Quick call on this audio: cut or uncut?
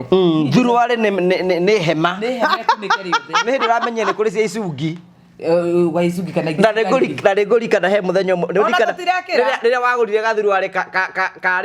uncut